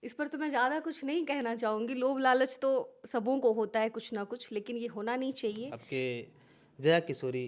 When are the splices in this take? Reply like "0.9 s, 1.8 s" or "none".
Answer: 5.7 s